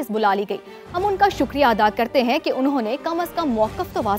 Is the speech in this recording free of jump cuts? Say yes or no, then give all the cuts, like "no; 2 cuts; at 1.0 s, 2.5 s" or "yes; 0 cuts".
yes; 0 cuts